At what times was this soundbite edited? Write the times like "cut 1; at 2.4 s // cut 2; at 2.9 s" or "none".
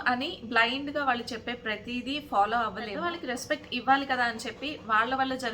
cut 1; at 2.9 s